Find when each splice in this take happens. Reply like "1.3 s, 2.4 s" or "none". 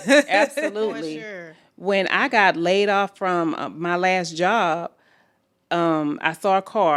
none